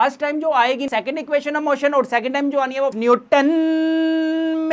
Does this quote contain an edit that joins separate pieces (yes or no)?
yes